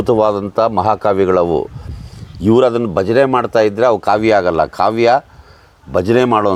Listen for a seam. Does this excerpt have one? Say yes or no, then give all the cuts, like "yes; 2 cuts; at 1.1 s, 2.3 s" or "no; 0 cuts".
no; 0 cuts